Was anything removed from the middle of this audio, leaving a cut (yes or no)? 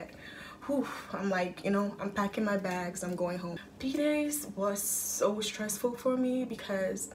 no